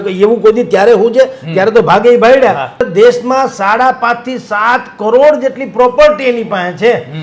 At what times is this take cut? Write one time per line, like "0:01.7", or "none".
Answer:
0:02.8